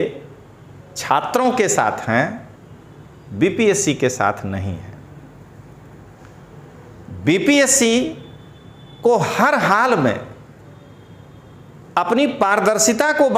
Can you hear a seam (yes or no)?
no